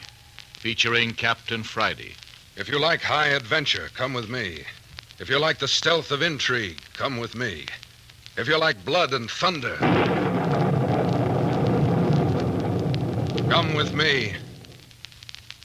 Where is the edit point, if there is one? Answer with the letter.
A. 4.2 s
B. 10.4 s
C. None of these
A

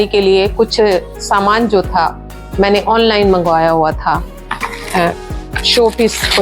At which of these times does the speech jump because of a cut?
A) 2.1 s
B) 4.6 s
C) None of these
B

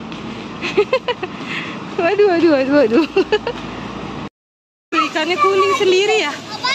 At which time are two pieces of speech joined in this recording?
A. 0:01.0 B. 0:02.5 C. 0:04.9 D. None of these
C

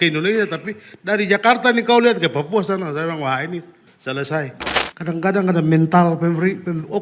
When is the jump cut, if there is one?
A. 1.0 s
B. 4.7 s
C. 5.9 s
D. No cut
B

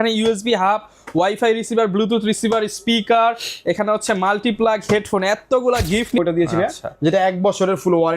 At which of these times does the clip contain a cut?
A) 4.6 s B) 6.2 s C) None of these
B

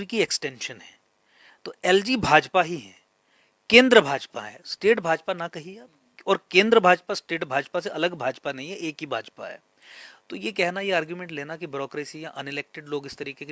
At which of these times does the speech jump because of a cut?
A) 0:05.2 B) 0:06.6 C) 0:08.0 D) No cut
D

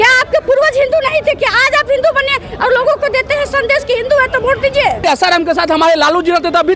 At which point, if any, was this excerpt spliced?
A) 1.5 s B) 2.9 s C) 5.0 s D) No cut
C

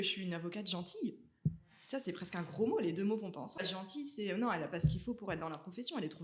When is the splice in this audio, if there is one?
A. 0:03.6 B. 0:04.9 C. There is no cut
A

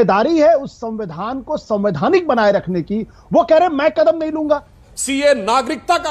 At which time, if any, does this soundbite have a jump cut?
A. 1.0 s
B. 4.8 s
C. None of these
B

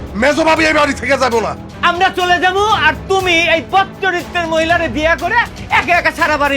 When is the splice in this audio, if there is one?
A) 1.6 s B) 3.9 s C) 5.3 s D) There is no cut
A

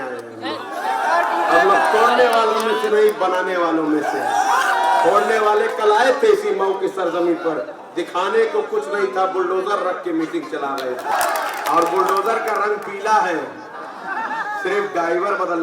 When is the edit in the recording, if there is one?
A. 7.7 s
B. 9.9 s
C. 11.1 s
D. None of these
C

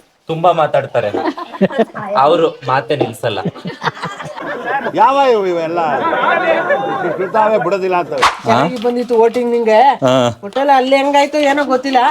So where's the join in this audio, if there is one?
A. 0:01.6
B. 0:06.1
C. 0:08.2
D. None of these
C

